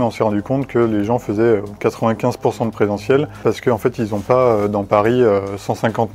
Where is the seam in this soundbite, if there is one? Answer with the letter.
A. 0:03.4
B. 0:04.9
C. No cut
A